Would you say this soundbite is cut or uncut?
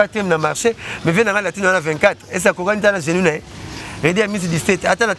uncut